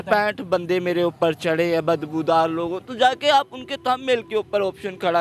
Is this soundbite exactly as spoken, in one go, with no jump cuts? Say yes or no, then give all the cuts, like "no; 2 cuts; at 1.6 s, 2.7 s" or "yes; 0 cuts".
yes; 0 cuts